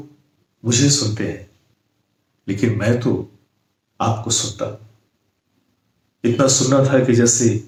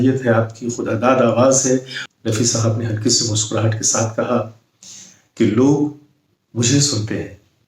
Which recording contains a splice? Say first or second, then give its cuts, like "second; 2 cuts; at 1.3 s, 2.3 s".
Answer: second; 1 cut; at 2.0 s